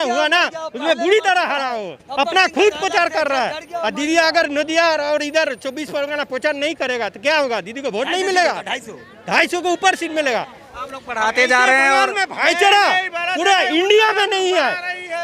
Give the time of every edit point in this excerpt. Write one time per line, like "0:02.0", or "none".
0:02.0